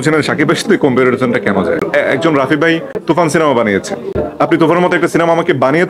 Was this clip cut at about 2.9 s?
yes; 2 cuts; at 1.9 s, 2.9 s

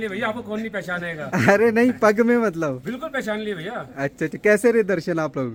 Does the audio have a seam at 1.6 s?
no; 0 cuts

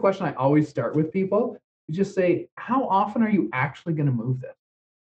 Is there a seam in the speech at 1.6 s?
yes; 1 cut; at 1.6 s

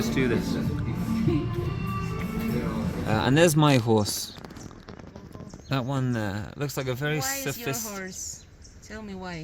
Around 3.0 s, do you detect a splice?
yes; 1 cut; at 3.0 s

